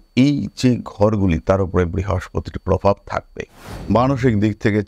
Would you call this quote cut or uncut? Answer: cut